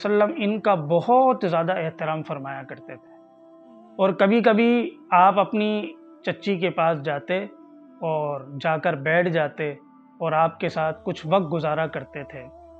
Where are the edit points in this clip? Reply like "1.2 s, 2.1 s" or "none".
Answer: none